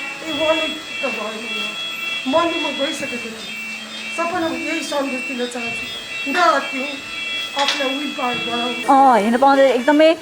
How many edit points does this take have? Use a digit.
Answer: 1